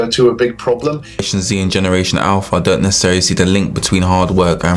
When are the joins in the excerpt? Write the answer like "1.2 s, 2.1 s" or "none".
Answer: 1.2 s